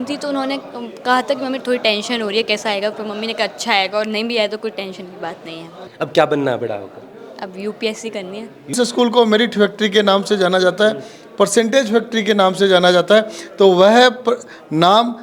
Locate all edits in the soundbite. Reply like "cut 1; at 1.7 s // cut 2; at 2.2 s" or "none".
cut 1; at 5.8 s // cut 2; at 8.7 s